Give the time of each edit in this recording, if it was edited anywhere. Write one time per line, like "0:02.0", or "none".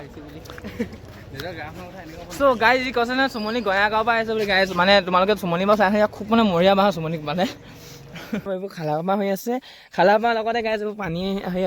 0:01.0
0:08.4